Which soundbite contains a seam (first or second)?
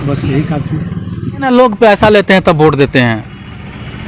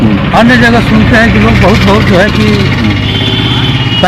first